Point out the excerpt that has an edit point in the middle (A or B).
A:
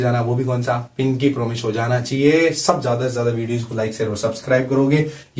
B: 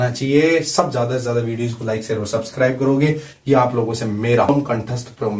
B